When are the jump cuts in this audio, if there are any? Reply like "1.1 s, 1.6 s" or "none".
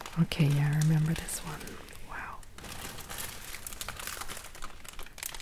none